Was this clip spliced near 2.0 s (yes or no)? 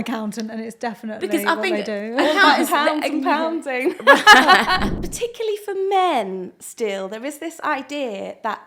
no